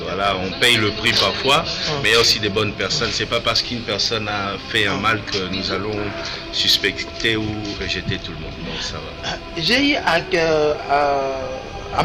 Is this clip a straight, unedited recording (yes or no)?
yes